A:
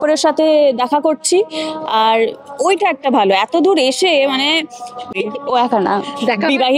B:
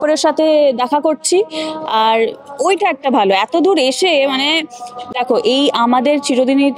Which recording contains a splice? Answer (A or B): A